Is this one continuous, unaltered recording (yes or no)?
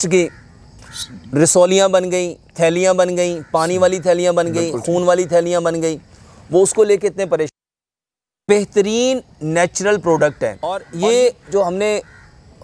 no